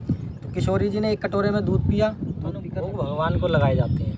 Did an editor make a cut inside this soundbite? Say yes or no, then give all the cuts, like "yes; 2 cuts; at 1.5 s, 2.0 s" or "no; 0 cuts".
yes; 1 cut; at 2.8 s